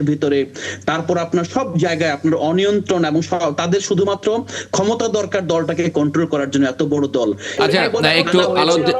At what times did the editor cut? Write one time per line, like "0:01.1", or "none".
0:07.5